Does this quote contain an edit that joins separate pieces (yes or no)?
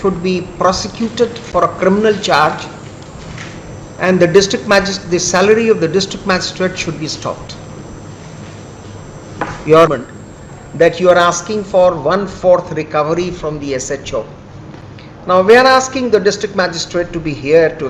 yes